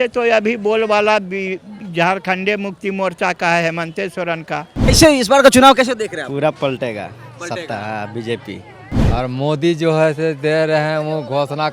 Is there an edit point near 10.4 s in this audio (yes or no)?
no